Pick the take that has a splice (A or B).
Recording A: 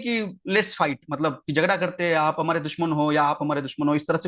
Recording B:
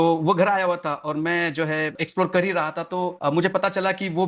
B